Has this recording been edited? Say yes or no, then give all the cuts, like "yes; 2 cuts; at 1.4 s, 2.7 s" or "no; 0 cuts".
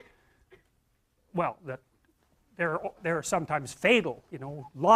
no; 0 cuts